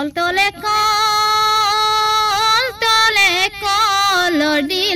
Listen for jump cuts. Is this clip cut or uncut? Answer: uncut